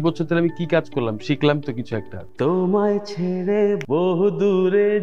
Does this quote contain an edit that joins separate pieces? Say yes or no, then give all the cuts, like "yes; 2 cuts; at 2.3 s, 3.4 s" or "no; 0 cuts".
yes; 2 cuts; at 2.2 s, 3.8 s